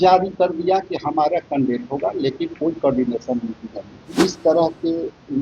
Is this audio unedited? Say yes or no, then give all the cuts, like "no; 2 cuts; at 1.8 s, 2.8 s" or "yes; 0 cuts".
no; 1 cut; at 4.1 s